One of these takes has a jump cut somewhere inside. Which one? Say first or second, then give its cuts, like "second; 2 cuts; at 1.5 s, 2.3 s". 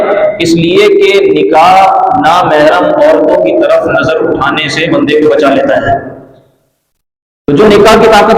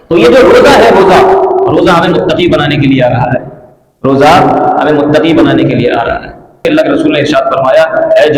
second; 1 cut; at 6.6 s